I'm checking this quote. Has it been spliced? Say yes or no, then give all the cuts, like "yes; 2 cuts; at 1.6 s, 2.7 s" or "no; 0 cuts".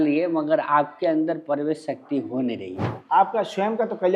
yes; 1 cut; at 3.0 s